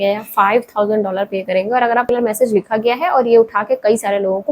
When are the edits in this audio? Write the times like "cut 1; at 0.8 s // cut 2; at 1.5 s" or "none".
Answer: cut 1; at 2.1 s